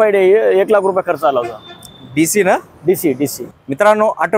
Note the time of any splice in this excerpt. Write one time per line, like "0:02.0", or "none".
0:03.5